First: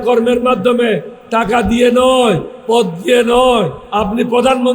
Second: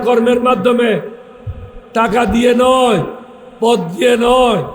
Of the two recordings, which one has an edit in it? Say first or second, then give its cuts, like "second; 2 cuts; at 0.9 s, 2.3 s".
first; 3 cuts; at 1.2 s, 2.5 s, 3.8 s